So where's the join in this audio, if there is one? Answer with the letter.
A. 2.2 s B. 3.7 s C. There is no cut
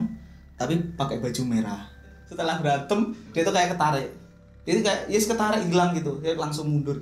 A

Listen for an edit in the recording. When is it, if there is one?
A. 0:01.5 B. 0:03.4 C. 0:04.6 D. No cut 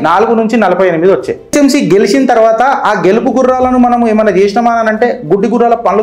A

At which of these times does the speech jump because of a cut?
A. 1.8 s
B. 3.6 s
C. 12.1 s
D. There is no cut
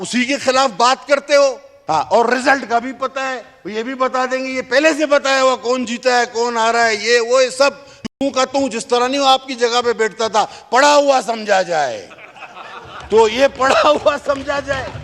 A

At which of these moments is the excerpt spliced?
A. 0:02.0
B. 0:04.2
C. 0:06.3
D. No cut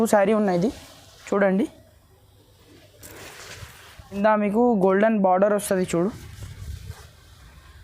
B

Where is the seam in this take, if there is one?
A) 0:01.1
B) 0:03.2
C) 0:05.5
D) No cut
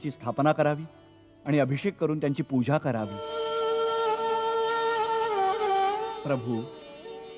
B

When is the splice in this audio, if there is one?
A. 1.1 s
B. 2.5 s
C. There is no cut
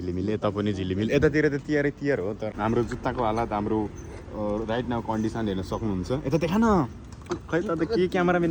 B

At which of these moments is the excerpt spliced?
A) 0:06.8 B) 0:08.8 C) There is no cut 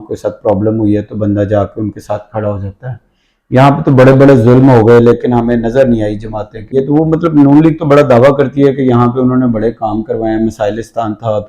A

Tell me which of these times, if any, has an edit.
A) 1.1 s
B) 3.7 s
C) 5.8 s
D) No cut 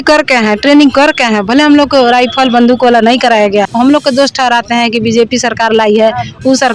B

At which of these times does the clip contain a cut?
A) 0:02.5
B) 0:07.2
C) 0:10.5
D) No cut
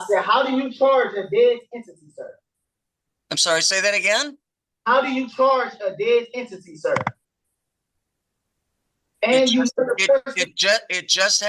D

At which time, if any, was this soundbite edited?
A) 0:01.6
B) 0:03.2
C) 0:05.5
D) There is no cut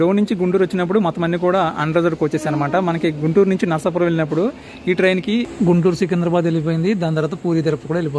C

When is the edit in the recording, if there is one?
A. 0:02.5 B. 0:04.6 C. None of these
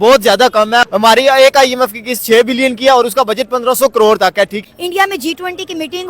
B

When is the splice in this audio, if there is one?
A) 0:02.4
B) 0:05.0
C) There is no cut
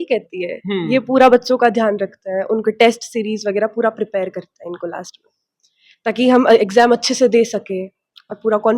C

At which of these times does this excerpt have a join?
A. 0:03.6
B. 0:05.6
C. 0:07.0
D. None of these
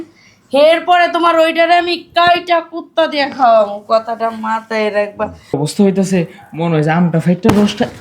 B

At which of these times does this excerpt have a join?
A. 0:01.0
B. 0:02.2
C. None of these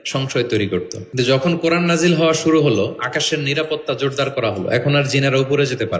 A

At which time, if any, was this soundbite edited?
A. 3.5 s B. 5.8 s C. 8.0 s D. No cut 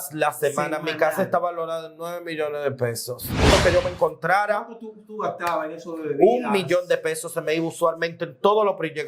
A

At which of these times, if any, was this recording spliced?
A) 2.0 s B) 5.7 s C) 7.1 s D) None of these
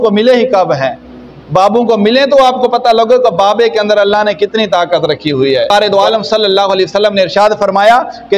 B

